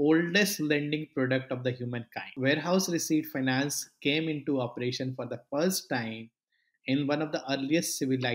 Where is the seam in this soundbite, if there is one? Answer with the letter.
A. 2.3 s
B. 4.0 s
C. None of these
A